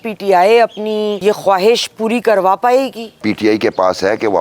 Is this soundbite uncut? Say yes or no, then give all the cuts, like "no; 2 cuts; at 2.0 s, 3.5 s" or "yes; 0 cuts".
no; 2 cuts; at 1.2 s, 3.2 s